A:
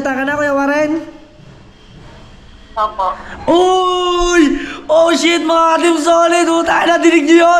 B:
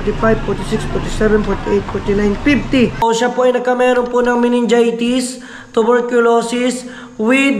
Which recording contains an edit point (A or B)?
B